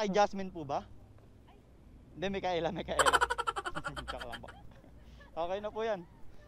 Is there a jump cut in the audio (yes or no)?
no